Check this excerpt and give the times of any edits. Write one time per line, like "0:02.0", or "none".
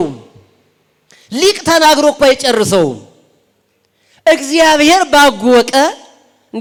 none